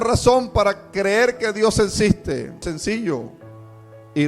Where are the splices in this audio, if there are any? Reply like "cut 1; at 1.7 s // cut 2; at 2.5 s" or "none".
cut 1; at 2.6 s